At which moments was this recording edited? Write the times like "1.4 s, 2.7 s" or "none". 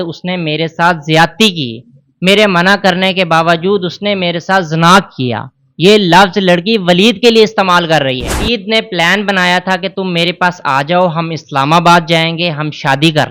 8.4 s